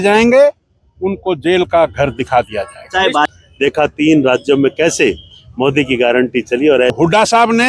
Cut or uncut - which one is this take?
cut